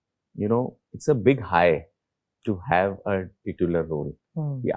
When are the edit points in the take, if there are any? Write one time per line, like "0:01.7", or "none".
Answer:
none